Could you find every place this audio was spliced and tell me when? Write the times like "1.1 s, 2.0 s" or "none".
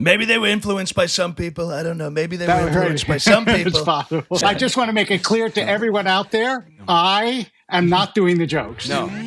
4.4 s, 6.7 s